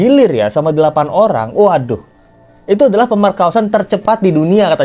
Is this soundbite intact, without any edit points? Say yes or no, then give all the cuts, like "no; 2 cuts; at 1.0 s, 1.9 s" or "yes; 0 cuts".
yes; 0 cuts